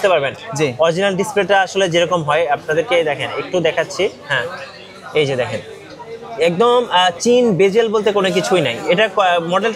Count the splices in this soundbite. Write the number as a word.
zero